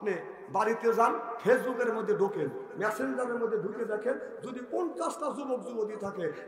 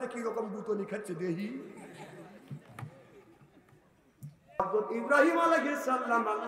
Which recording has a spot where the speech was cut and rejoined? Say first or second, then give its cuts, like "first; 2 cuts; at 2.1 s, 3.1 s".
second; 1 cut; at 4.6 s